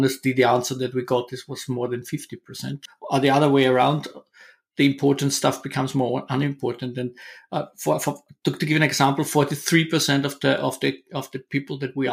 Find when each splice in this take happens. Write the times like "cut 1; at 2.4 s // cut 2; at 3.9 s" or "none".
cut 1; at 2.9 s